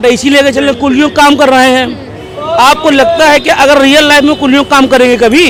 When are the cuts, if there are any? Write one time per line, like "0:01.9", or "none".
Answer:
none